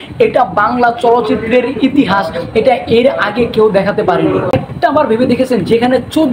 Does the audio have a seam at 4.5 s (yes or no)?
yes